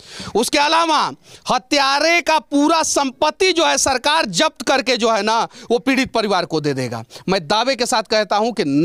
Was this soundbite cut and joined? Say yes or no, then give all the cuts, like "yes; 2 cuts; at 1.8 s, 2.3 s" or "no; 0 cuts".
no; 0 cuts